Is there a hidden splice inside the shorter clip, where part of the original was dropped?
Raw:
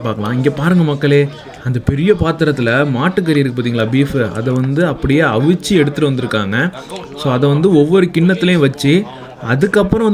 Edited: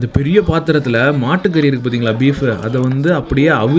no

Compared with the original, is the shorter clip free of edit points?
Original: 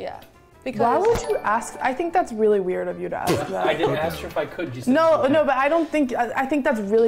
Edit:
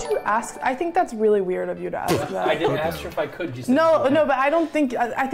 yes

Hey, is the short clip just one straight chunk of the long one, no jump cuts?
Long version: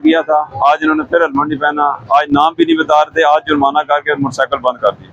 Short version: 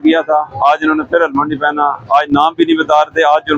yes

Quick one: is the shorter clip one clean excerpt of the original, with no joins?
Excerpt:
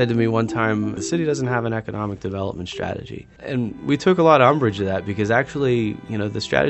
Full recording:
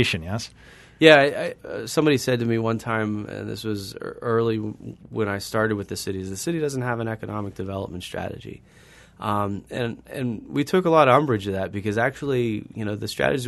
no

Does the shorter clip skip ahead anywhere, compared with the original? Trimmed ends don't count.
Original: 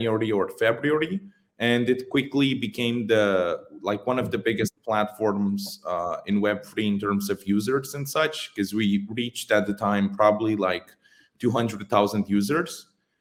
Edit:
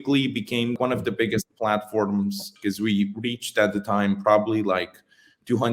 yes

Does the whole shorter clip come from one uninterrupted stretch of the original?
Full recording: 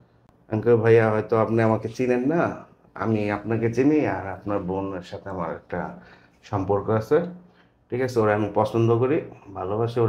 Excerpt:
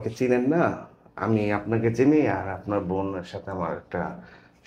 yes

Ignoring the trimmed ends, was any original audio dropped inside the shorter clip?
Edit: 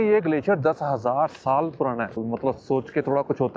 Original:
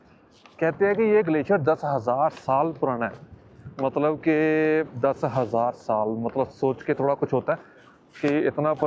yes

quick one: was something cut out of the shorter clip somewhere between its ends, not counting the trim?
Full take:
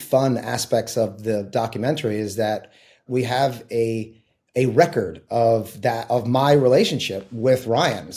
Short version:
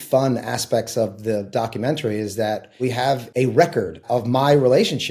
yes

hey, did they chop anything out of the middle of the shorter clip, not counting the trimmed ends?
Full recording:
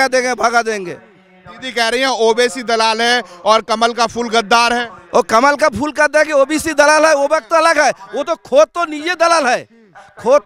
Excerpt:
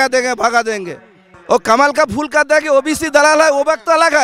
yes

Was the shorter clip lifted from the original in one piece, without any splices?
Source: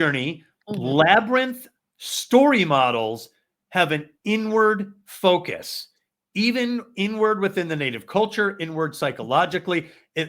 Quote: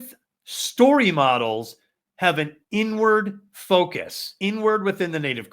no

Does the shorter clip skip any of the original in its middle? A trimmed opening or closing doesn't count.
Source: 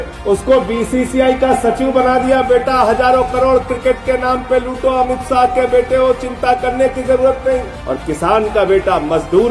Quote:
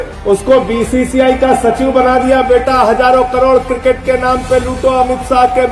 no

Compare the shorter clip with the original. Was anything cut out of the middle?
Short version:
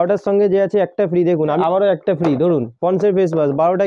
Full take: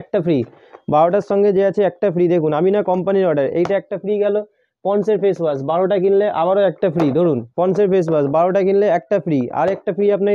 yes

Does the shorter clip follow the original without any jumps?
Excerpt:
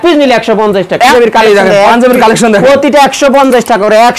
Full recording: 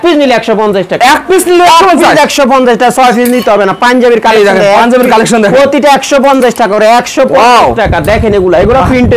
no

